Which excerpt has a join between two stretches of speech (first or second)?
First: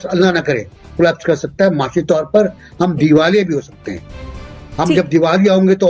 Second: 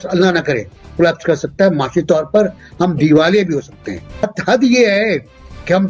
second